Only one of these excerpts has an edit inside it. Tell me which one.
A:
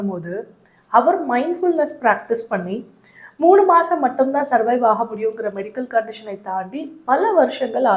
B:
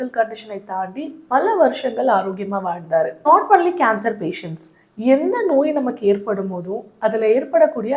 B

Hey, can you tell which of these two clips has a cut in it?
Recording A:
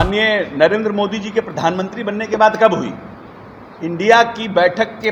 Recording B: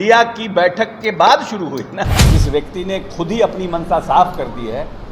B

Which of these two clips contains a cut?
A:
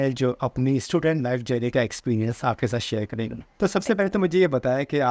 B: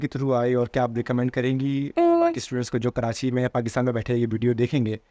A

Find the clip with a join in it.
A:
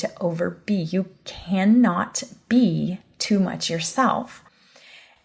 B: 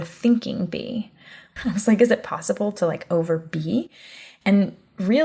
B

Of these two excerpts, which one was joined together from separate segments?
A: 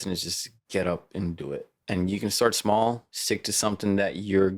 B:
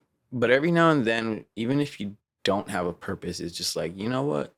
A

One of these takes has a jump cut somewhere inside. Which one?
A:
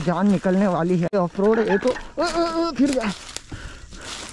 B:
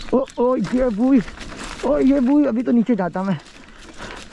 A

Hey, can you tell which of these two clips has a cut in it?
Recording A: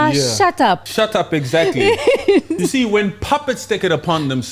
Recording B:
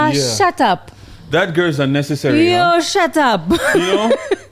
A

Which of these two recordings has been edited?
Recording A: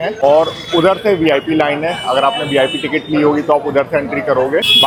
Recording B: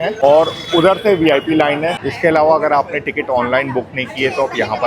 B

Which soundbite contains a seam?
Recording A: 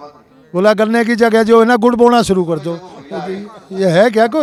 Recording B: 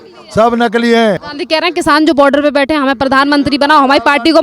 B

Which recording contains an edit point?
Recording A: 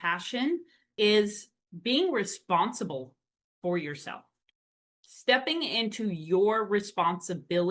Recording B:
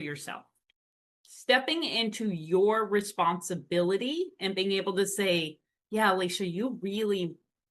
A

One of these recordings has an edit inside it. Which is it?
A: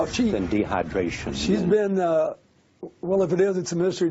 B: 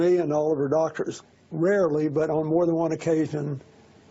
B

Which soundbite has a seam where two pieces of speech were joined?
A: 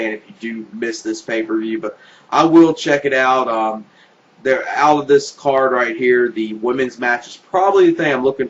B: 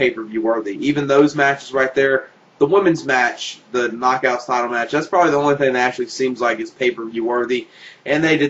A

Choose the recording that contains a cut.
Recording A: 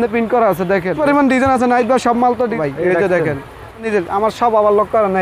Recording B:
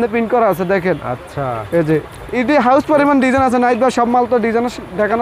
A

